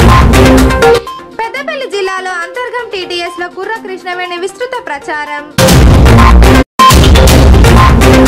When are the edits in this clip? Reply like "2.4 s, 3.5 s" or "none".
1.1 s